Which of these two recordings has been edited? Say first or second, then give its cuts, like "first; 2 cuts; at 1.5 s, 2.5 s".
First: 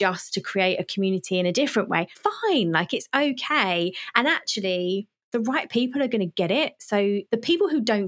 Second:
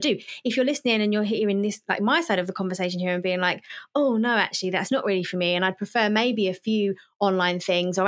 first; 3 cuts; at 2.1 s, 5.2 s, 7.2 s